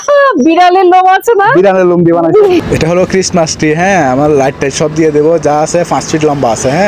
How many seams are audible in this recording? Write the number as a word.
one